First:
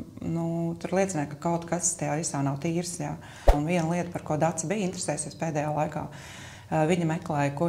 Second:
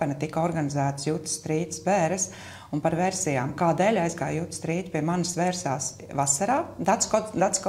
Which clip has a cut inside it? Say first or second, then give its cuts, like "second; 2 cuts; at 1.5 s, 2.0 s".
first; 1 cut; at 3.5 s